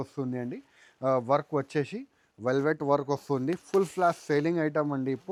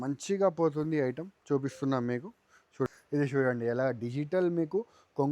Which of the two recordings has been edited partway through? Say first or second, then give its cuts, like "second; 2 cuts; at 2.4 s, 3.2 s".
second; 1 cut; at 2.9 s